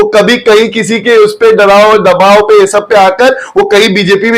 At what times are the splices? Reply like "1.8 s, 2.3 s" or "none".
none